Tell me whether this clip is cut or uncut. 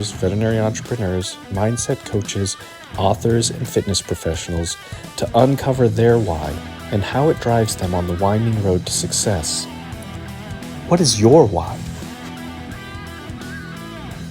uncut